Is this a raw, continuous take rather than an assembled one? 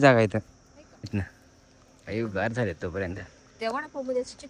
no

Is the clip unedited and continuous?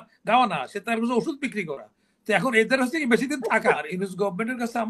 no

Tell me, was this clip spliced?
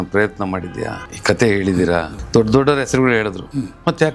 yes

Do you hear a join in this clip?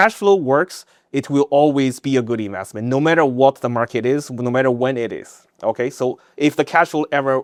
no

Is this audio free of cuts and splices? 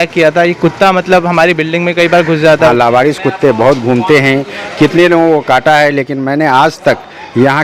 no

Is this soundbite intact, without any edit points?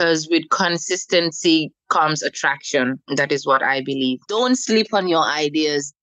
no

